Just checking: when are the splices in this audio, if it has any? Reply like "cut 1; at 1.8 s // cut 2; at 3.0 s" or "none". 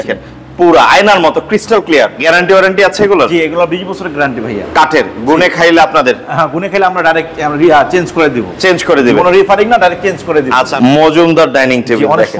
cut 1; at 2.2 s // cut 2; at 10.7 s